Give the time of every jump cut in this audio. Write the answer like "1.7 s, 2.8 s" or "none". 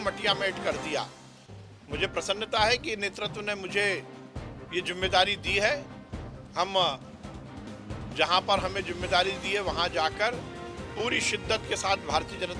none